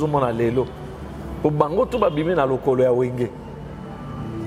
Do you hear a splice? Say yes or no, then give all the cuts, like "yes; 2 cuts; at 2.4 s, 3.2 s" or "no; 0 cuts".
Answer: no; 0 cuts